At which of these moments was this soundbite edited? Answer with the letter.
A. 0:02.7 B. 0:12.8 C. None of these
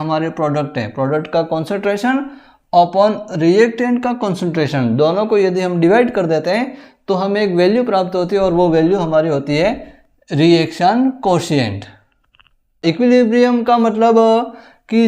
B